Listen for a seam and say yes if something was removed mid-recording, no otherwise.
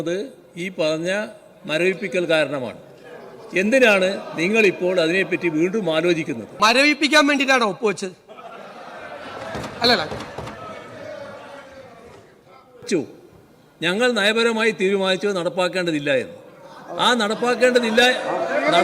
yes